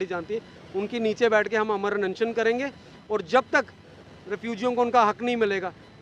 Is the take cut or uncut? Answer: uncut